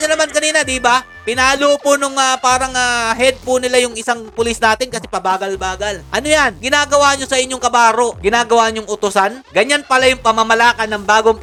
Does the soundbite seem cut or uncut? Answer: uncut